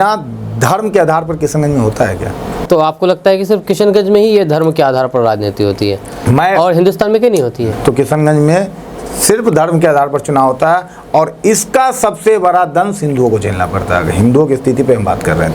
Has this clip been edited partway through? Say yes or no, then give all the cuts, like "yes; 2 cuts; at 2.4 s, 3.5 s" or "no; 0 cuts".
yes; 2 cuts; at 2.6 s, 7.7 s